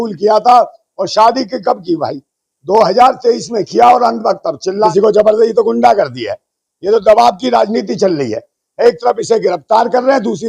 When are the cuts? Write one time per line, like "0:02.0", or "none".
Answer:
0:04.6